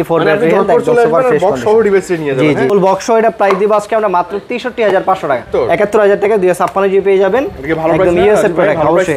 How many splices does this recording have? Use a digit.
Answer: 2